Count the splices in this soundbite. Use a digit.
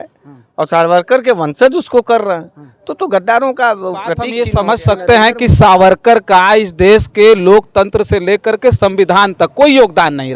1